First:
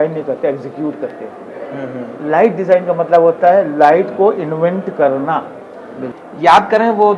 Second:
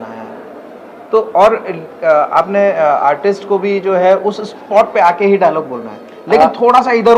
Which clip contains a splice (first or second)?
first